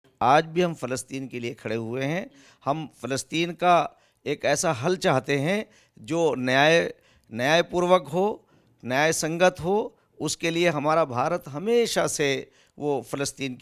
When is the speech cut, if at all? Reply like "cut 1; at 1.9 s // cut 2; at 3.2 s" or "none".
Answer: none